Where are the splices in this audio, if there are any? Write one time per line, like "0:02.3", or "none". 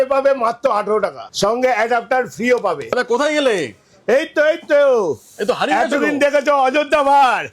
0:01.2
0:02.8